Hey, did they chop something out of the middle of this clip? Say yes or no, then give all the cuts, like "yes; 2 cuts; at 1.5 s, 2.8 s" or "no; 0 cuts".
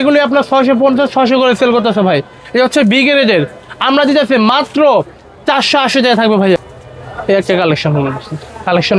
yes; 1 cut; at 6.6 s